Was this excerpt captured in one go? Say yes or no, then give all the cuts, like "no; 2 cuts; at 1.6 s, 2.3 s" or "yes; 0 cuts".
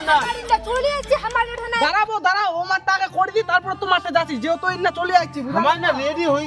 yes; 0 cuts